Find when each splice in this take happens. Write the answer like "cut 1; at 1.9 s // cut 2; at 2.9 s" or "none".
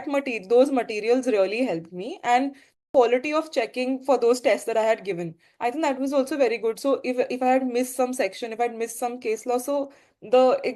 cut 1; at 2.9 s